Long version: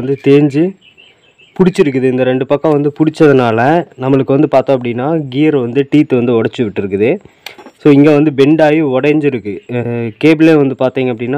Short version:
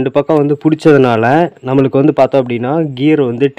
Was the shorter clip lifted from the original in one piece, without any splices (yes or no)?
yes